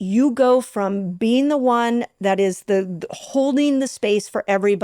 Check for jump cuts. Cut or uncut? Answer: uncut